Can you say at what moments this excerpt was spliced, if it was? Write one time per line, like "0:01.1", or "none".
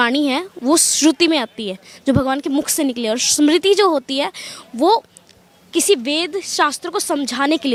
none